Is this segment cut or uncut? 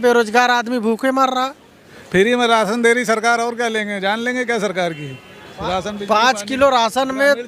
cut